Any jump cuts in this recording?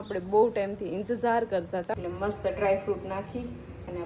yes; 1 cut; at 1.9 s

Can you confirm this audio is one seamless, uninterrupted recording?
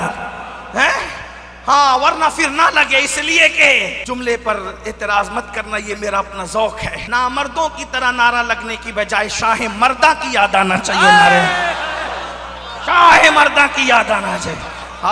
no; 2 cuts; at 4.0 s, 6.9 s

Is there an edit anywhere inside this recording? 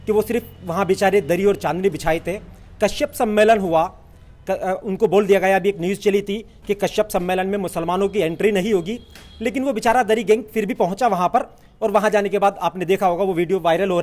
no; 0 cuts

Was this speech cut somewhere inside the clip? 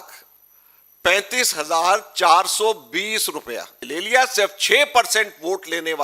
yes; 1 cut; at 3.8 s

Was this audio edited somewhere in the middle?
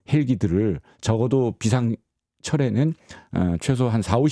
no; 0 cuts

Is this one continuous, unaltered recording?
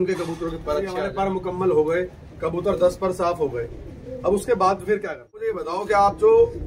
no; 2 cuts; at 1.1 s, 5.6 s

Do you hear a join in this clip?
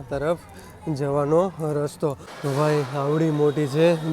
yes; 1 cut; at 2.3 s

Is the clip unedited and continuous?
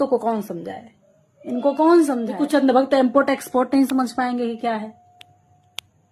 no; 1 cut; at 2.3 s

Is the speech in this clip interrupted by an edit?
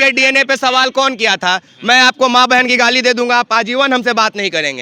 no; 0 cuts

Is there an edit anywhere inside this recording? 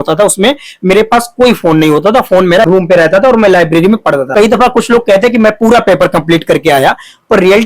yes; 2 cuts; at 2.6 s, 4.3 s

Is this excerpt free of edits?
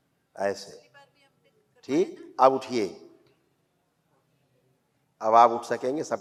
yes; 0 cuts

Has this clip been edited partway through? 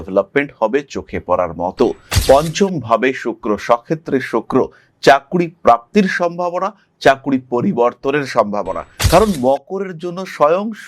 yes; 1 cut; at 2.1 s

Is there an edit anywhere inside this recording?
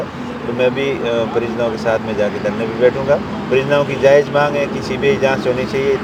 no; 0 cuts

